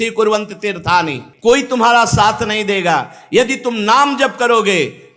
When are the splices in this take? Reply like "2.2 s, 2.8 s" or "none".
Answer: 1.2 s